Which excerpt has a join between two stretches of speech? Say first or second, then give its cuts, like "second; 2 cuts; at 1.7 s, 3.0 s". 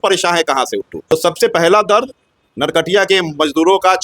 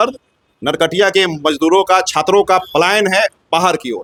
first; 1 cut; at 0.9 s